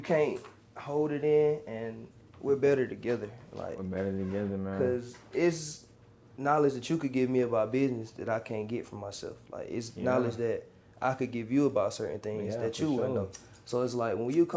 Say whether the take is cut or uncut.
uncut